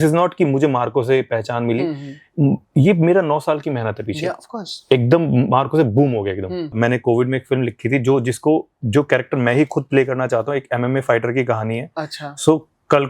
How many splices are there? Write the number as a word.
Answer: one